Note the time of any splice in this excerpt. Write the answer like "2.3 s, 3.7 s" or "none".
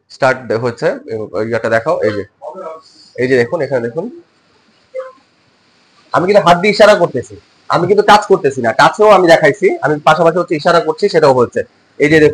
none